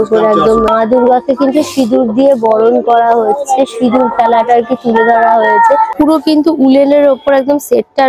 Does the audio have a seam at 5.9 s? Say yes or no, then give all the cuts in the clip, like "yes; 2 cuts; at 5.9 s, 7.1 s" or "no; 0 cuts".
yes; 2 cuts; at 0.7 s, 5.9 s